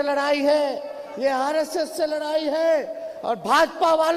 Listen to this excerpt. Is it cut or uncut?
uncut